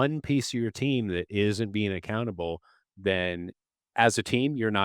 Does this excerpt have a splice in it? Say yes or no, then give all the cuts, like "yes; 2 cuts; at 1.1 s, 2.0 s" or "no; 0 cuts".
yes; 1 cut; at 3.9 s